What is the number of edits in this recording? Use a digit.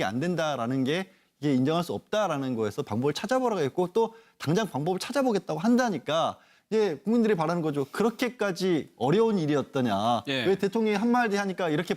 1